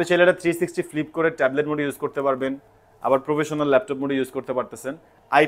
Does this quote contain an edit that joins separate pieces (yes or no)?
no